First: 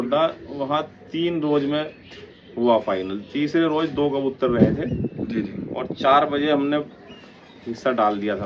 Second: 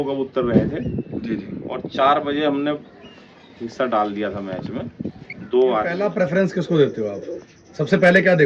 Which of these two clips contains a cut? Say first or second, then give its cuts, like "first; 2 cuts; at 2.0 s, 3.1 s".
second; 1 cut; at 6.0 s